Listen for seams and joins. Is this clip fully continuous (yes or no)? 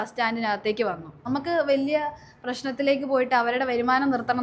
no